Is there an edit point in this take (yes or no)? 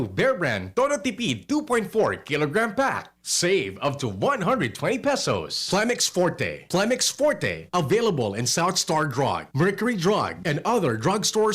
yes